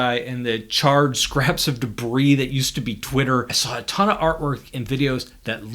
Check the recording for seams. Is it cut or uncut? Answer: cut